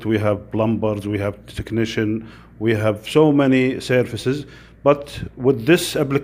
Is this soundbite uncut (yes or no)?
yes